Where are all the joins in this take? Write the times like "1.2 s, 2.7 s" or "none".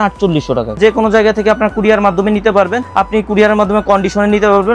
0.8 s, 2.8 s